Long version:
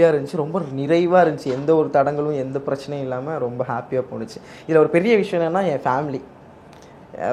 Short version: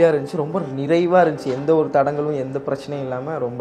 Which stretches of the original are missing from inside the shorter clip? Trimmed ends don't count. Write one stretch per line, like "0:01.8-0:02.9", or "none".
none

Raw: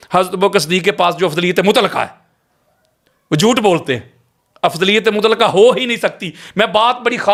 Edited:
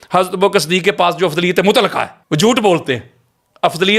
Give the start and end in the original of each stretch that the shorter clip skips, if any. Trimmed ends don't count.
0:02.2-0:03.2

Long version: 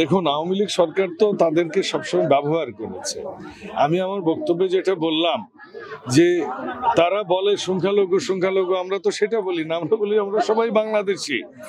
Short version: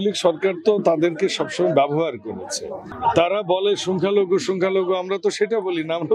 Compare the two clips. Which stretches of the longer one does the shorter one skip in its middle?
0:03.4-0:06.7

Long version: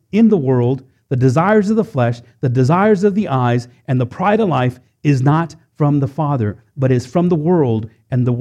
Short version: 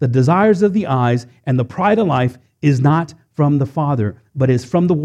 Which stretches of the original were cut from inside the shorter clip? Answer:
none

